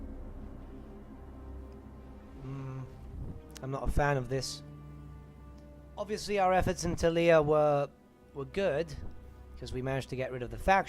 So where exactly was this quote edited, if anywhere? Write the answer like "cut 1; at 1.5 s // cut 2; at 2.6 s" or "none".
cut 1; at 5.6 s